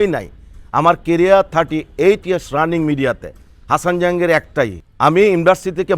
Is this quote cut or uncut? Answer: cut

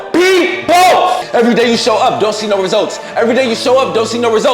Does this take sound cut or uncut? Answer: cut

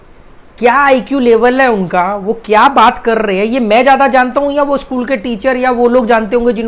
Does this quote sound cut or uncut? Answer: uncut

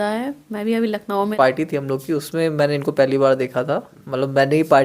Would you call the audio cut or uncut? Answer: cut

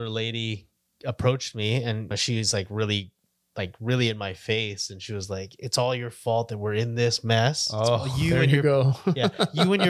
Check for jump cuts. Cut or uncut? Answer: cut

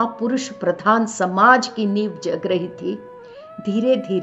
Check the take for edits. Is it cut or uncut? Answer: uncut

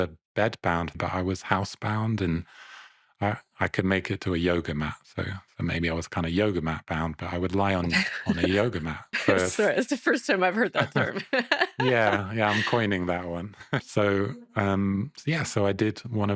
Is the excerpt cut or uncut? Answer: cut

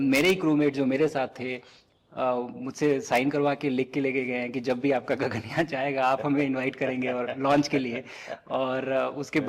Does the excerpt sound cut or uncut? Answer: uncut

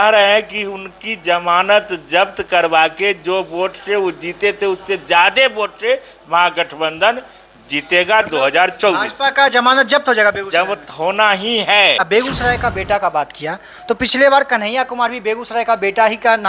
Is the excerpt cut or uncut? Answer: cut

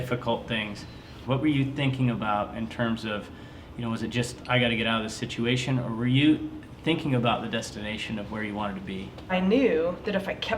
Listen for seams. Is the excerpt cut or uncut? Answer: cut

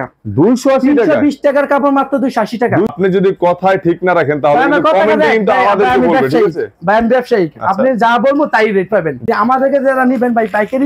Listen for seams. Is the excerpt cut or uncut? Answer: cut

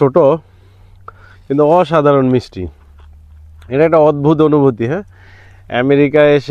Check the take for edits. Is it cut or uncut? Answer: uncut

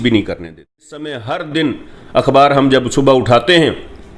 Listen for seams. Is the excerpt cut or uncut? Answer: cut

